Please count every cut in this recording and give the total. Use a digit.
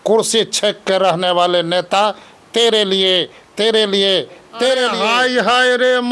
1